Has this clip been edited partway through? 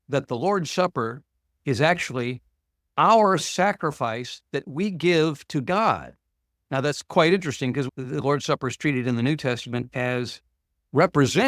yes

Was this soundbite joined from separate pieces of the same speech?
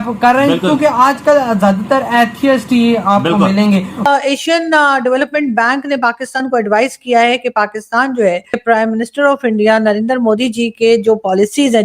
yes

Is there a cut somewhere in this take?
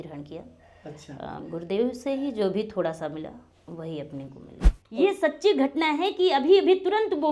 yes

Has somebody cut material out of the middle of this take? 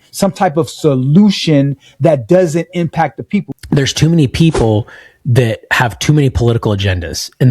yes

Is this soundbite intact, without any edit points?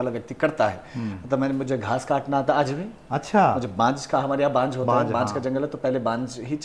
yes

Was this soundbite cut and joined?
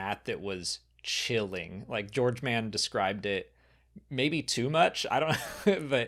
no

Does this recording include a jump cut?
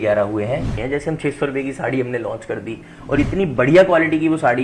yes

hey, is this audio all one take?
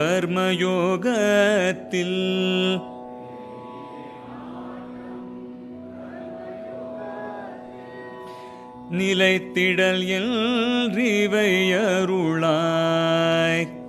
yes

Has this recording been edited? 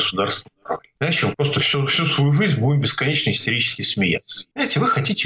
yes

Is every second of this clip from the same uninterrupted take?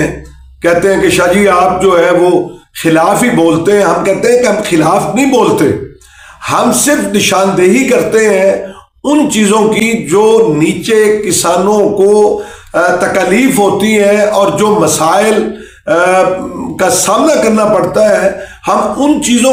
yes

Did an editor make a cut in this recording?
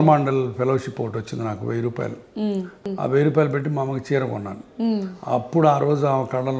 yes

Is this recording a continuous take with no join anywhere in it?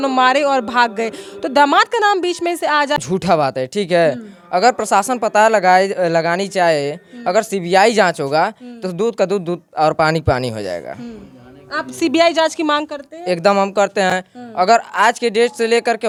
yes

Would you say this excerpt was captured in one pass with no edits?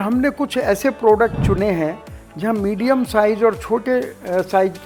yes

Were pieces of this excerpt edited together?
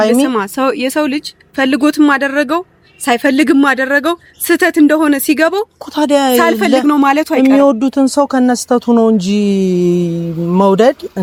no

